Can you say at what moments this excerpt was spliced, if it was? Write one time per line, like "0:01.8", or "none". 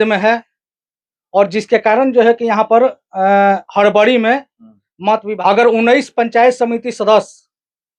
0:05.3